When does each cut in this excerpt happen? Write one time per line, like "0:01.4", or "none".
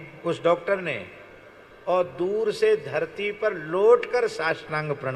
none